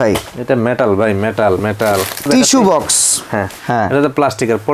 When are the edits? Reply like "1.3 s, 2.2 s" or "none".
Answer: 2.2 s, 3.6 s